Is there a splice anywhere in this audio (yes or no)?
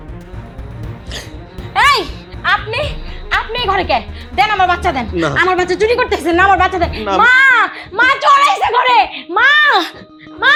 no